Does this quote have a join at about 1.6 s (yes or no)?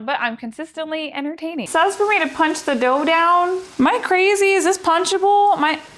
yes